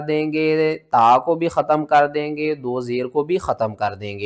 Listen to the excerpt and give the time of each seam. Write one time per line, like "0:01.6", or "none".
none